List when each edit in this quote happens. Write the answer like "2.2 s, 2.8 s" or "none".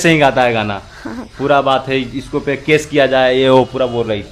none

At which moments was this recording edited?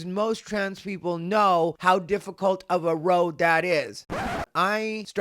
4.0 s

